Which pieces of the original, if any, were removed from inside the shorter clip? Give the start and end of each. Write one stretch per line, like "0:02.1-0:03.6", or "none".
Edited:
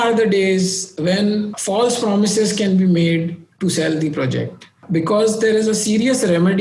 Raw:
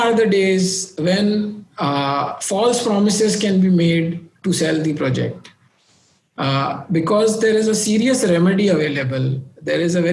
0:01.6-0:02.4
0:05.6-0:06.8